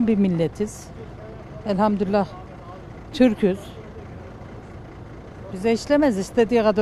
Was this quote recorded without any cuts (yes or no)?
yes